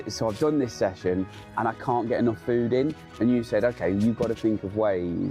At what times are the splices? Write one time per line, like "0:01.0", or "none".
none